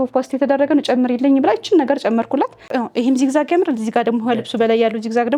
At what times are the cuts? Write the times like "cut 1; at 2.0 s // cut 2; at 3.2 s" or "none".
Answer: cut 1; at 2.7 s